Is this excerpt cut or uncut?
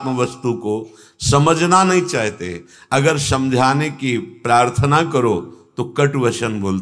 uncut